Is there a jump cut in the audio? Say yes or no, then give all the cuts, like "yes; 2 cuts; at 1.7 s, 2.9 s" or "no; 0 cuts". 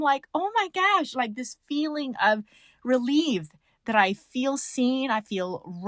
no; 0 cuts